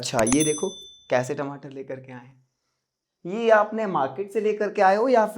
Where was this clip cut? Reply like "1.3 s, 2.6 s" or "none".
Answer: none